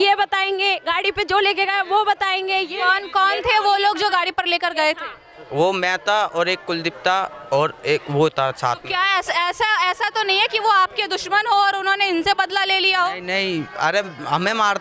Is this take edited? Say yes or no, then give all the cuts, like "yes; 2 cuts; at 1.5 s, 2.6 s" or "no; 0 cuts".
no; 0 cuts